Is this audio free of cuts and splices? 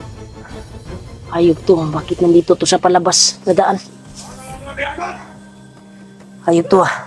no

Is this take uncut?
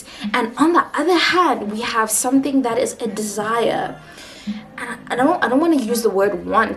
yes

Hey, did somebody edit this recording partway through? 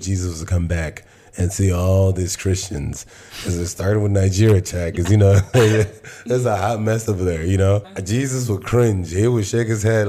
yes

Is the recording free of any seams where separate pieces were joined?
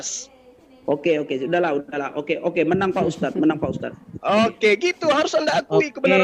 yes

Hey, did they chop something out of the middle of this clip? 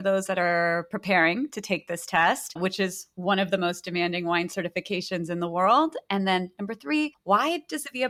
no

